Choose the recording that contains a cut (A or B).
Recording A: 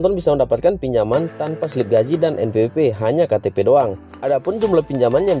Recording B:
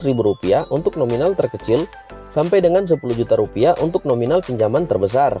A